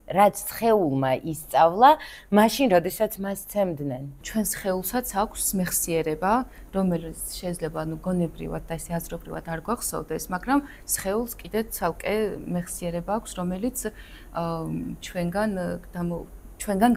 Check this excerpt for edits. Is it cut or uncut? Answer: cut